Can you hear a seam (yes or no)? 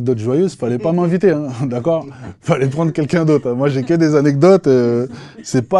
no